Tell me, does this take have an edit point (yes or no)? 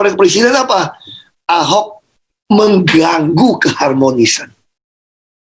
no